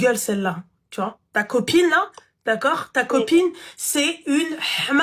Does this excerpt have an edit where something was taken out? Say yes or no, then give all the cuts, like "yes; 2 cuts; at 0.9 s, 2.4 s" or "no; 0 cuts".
no; 0 cuts